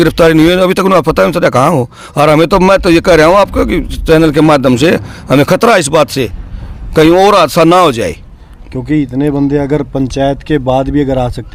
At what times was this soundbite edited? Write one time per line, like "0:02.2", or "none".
none